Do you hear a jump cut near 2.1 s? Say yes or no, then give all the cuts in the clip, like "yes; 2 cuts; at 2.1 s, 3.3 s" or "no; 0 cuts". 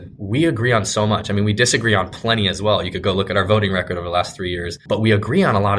no; 1 cut; at 4.8 s